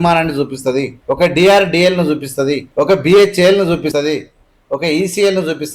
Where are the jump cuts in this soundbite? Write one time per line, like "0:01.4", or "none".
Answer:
0:01.0
0:02.6